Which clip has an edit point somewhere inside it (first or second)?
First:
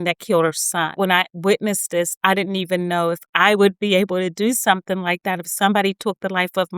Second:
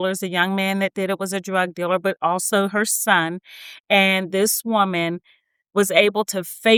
first